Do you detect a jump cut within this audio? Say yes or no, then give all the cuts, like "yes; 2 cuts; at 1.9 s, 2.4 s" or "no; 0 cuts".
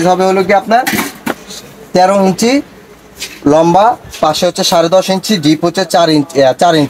no; 0 cuts